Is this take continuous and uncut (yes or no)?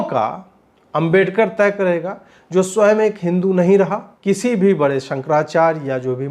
no